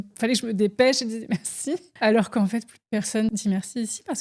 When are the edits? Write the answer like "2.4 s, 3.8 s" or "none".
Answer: 1.9 s, 3.3 s